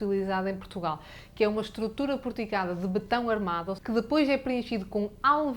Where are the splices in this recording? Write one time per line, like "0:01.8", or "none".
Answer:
0:03.7